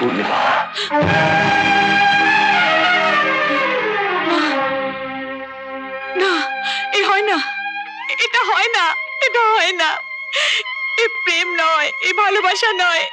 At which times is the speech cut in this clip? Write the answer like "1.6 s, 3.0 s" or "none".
none